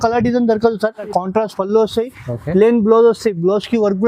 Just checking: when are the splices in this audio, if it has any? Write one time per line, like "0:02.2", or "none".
0:01.1